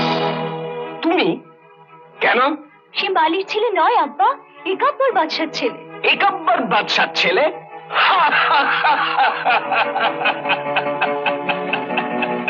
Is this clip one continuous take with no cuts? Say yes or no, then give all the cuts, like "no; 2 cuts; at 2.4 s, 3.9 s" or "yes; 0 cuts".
yes; 0 cuts